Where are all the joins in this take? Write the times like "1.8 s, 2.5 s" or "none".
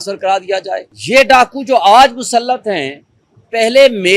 0.9 s